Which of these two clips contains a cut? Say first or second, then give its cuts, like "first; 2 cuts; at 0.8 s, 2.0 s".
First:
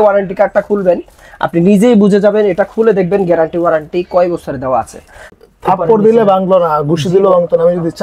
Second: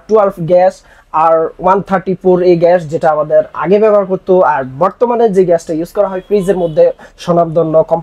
first; 1 cut; at 5.4 s